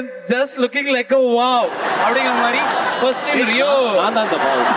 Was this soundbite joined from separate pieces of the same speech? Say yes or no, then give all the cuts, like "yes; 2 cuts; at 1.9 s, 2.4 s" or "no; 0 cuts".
no; 0 cuts